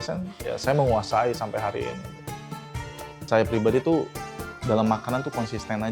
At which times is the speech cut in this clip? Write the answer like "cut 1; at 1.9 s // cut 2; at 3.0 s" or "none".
cut 1; at 2.6 s

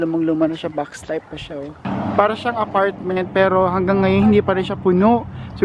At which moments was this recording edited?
cut 1; at 1.9 s

